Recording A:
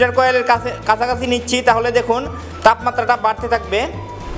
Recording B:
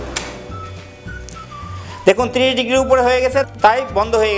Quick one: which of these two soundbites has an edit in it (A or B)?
B